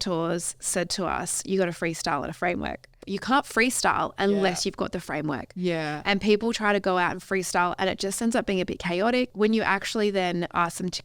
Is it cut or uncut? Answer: cut